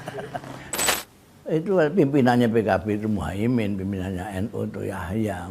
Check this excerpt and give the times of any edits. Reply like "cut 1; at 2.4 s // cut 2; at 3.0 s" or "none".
cut 1; at 0.9 s